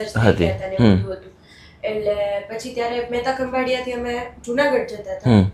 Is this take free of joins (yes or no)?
yes